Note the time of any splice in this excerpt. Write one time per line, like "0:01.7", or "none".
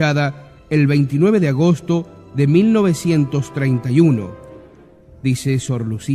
0:01.5